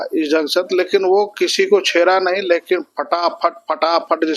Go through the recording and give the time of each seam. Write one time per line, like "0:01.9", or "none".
none